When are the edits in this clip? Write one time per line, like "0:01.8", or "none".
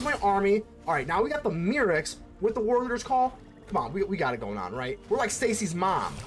0:05.0